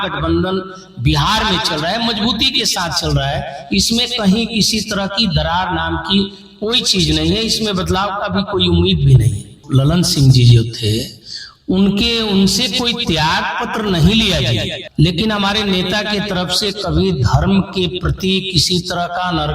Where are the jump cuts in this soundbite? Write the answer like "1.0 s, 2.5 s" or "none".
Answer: 9.5 s, 14.8 s